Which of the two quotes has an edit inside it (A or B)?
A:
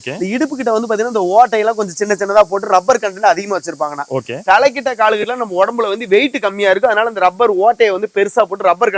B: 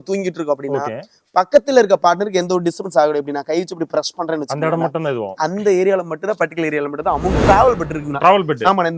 B